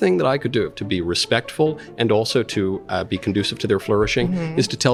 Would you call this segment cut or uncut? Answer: uncut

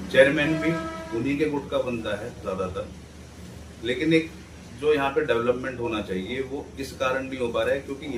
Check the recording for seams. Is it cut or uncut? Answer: uncut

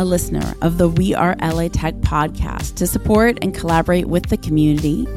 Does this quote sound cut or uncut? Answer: uncut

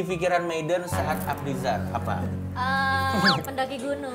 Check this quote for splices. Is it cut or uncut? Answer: uncut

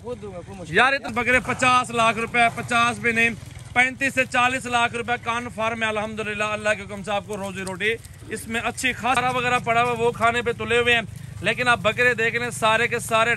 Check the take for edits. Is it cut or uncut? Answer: cut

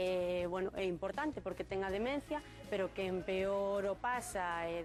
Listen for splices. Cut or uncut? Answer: uncut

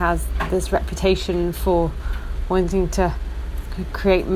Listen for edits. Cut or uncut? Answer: uncut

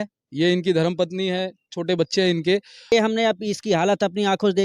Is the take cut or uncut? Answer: cut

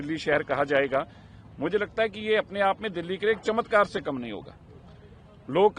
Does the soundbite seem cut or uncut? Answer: uncut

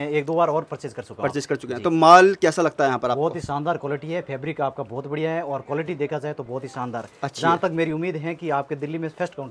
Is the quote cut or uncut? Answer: uncut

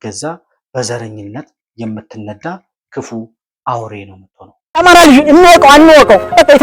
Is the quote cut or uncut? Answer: cut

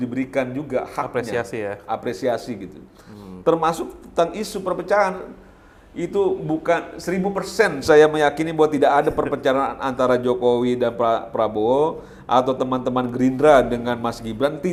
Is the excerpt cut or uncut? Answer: uncut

